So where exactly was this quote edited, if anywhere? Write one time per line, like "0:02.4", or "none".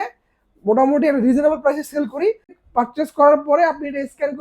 0:02.5